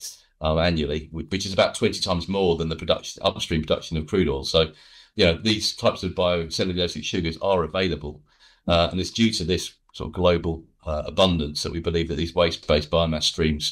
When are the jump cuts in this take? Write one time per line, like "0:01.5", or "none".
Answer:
0:12.6